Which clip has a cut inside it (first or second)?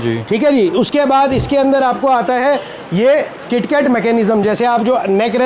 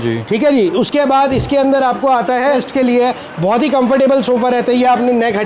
second